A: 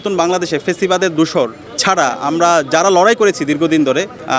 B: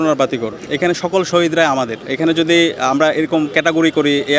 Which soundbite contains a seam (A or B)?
B